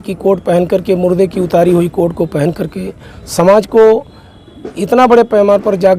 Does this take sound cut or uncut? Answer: uncut